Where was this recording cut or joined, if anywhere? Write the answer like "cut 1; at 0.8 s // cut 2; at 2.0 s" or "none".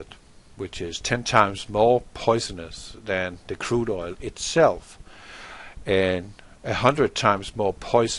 cut 1; at 6.4 s